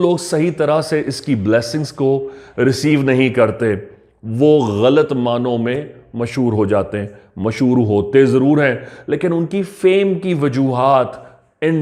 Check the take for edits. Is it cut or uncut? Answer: uncut